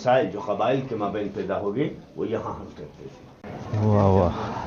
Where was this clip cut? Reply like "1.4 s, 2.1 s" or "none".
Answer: 3.6 s